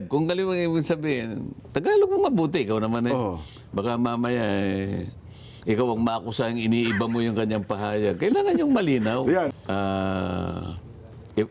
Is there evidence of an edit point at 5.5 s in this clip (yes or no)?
no